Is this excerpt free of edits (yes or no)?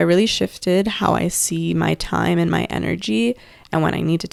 yes